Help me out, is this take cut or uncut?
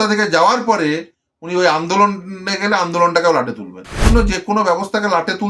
cut